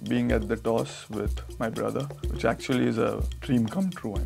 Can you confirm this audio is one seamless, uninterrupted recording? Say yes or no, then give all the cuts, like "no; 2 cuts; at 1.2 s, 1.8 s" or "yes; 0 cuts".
no; 2 cuts; at 2.2 s, 3.3 s